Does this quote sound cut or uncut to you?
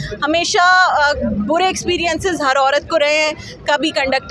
uncut